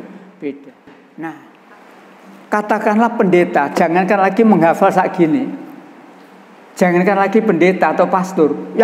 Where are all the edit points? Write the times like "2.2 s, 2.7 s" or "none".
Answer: 1.5 s